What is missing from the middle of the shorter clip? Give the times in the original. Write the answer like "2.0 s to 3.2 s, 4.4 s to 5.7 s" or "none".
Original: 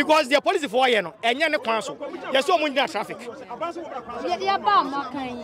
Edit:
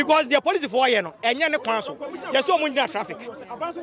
none